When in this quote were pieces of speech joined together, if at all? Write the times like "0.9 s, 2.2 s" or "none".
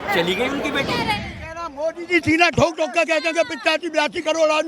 1.0 s